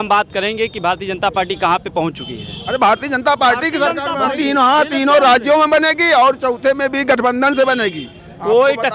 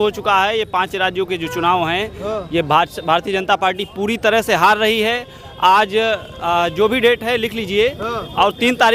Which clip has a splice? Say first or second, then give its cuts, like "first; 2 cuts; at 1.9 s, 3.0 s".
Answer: first; 1 cut; at 2.6 s